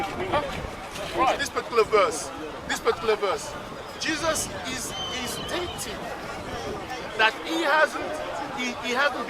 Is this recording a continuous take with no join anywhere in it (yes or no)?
no